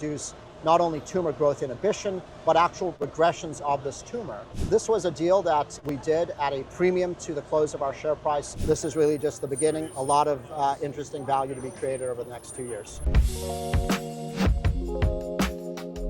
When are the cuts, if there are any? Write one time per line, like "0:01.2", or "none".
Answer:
0:03.0
0:04.5
0:05.8
0:08.5
0:13.0